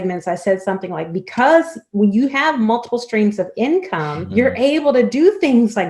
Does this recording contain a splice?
yes; 1 cut; at 4.2 s

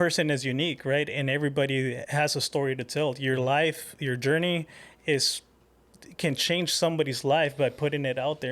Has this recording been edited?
yes; 1 cut; at 2.0 s

